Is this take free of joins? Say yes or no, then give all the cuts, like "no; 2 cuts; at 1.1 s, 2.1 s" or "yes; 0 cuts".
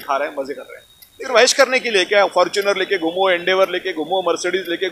no; 1 cut; at 1.2 s